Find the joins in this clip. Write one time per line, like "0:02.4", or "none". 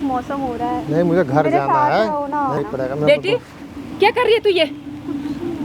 0:02.6